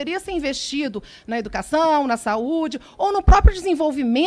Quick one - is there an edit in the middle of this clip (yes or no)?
no